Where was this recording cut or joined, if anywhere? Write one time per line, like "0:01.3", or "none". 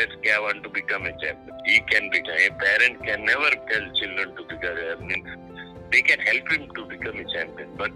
none